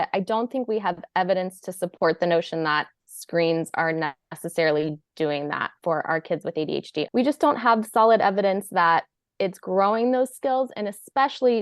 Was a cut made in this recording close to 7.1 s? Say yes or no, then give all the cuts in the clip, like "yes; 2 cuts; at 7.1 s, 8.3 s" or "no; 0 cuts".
yes; 1 cut; at 7.1 s